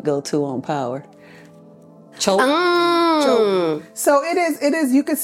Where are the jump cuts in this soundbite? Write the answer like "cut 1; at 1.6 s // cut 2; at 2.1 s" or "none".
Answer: none